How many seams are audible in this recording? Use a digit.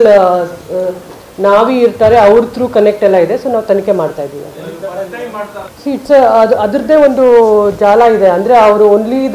1